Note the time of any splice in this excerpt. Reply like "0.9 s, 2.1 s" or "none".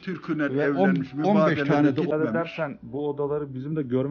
2.1 s